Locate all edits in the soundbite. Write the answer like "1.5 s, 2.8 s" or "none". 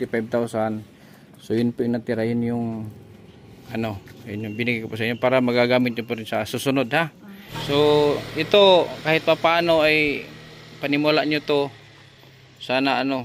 7.5 s